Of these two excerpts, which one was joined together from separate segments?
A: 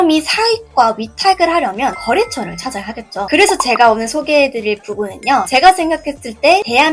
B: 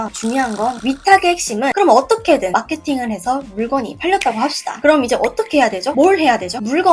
B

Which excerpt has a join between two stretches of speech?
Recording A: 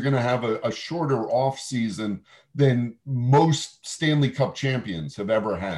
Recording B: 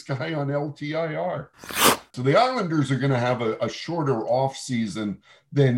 B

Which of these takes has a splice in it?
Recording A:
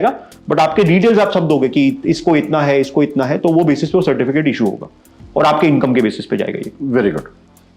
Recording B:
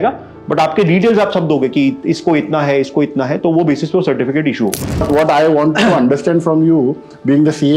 B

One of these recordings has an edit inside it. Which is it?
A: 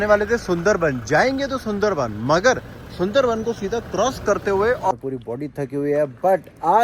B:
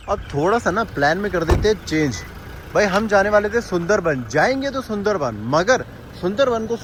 A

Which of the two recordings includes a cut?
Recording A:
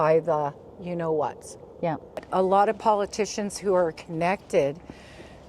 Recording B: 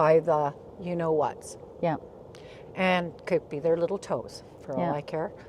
A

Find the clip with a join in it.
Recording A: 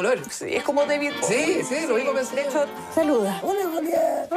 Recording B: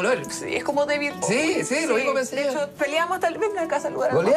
A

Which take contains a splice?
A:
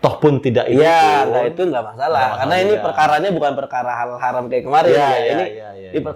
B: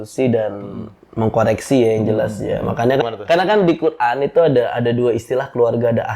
B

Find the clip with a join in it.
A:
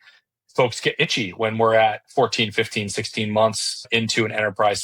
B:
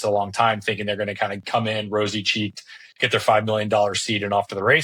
A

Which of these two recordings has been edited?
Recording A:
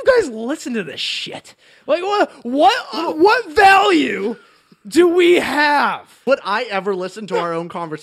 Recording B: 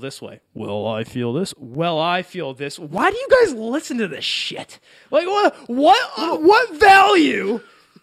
A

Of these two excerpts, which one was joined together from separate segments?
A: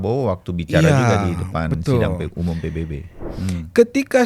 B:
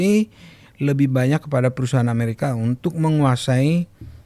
A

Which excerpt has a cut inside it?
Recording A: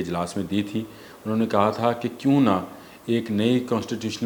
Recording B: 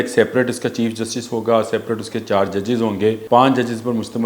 B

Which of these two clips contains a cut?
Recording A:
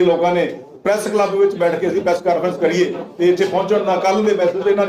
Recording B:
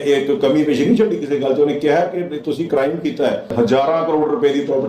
B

